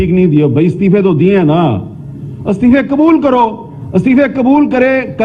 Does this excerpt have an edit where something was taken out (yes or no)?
no